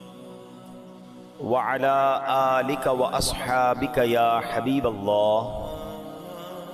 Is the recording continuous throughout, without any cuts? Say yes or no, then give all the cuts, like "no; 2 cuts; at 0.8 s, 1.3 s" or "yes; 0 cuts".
yes; 0 cuts